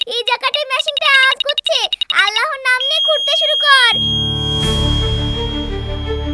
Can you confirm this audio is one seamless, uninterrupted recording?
yes; 0 cuts

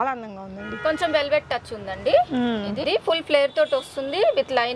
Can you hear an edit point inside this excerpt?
yes; 1 cut; at 2.8 s

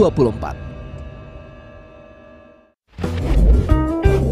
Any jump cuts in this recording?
yes; 1 cut; at 2.9 s

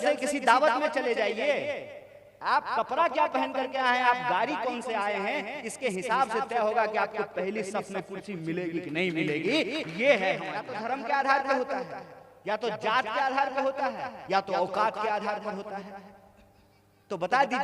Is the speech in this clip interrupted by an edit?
yes; 1 cut; at 10.7 s

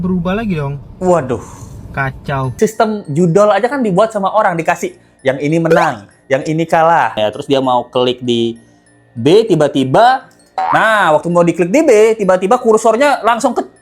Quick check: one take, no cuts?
no; 2 cuts; at 2.5 s, 7.2 s

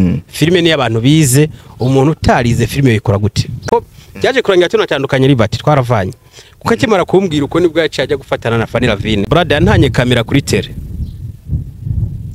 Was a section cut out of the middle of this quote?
yes; 2 cuts; at 3.5 s, 9.2 s

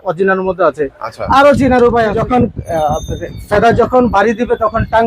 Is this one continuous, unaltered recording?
no; 1 cut; at 2.2 s

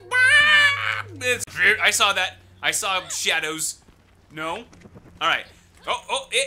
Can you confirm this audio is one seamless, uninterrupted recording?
no; 1 cut; at 1.5 s

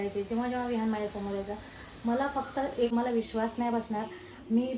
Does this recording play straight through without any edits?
no; 1 cut; at 2.9 s

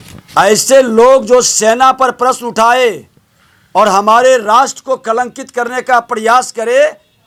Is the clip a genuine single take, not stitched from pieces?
yes; 0 cuts

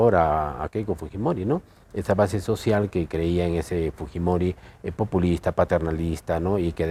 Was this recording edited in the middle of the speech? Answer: no; 0 cuts

